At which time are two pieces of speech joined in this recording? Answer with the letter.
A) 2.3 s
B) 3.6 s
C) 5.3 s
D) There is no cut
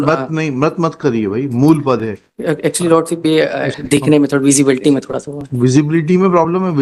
B